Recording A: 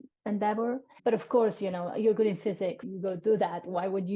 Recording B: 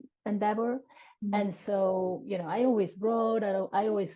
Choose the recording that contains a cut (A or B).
A